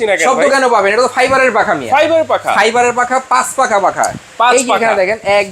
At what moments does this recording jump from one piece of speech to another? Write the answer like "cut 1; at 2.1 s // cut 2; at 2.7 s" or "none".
none